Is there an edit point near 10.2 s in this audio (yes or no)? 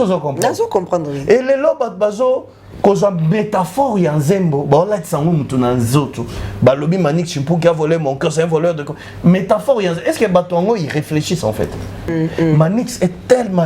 no